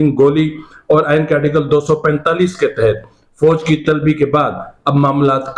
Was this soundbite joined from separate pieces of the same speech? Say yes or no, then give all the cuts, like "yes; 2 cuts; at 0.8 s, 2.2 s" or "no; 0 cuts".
no; 0 cuts